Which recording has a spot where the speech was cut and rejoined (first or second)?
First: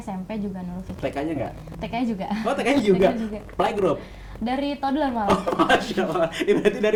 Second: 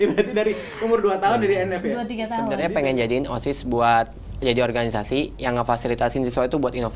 second